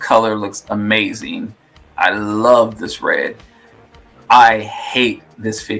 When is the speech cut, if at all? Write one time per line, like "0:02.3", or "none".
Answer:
none